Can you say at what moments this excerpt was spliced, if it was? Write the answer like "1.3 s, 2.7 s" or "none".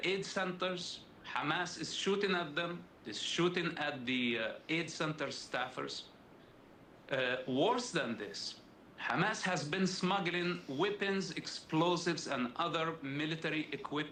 none